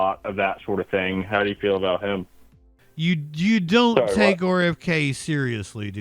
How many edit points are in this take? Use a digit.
1